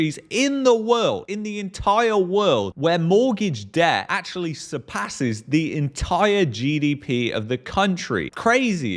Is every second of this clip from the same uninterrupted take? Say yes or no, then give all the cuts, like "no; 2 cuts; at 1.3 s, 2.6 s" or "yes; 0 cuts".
yes; 0 cuts